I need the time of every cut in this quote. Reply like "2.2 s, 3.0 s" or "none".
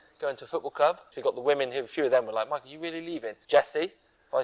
1.1 s, 3.3 s